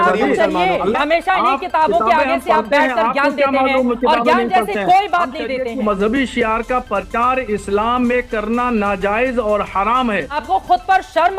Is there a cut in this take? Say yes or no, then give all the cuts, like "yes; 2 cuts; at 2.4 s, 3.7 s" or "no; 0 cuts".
yes; 3 cuts; at 1.0 s, 5.8 s, 10.4 s